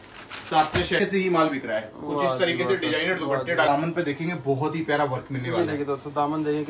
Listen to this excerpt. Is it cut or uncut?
cut